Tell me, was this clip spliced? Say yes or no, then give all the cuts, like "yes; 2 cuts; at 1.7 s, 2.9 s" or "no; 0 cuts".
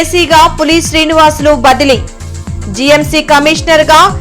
no; 0 cuts